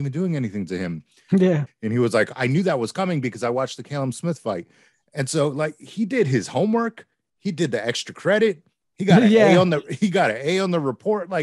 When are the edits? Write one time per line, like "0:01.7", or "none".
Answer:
0:01.6